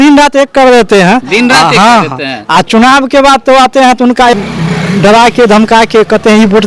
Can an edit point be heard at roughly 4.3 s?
yes; 1 cut; at 4.3 s

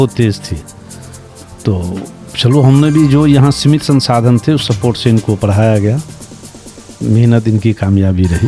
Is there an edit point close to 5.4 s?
no; 0 cuts

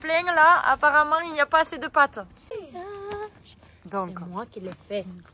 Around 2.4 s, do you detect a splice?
yes; 1 cut; at 2.4 s

